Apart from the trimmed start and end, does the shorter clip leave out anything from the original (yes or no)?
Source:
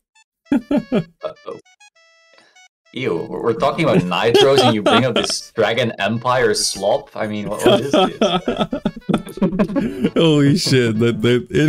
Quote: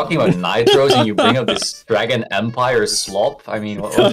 no